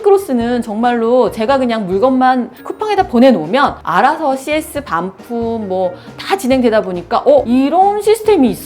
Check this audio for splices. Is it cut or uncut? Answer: cut